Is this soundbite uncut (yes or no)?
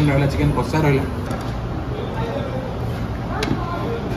yes